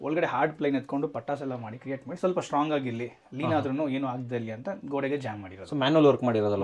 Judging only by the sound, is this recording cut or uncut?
uncut